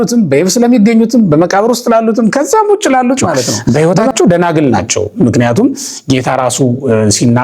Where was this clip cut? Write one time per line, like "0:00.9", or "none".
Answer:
0:03.6